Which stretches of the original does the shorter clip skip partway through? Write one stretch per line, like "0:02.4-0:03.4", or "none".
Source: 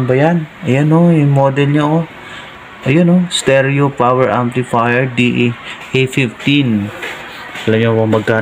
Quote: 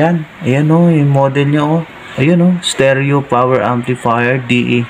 0:02.2-0:02.7